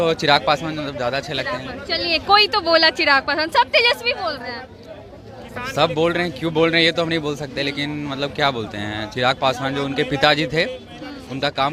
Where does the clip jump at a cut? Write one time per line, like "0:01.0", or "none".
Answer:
none